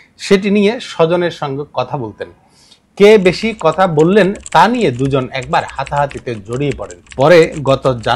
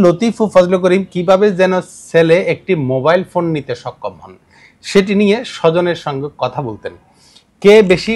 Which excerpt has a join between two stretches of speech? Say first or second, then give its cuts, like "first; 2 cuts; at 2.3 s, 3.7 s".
first; 1 cut; at 7.0 s